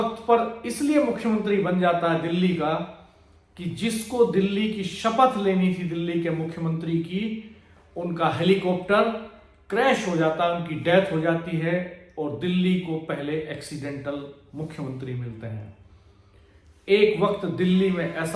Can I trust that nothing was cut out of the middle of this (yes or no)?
yes